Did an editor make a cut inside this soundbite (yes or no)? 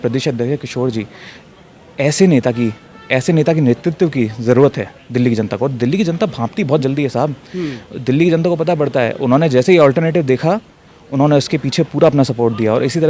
no